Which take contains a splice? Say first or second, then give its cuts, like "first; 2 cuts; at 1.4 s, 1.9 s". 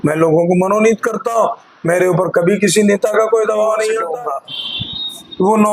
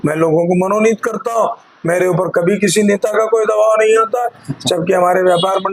first; 1 cut; at 4.1 s